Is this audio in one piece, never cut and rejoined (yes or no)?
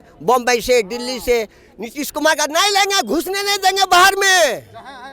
yes